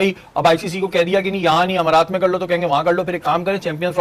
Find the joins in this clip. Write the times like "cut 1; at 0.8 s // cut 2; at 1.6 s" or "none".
none